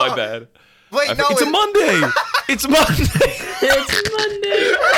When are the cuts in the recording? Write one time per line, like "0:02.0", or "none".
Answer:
none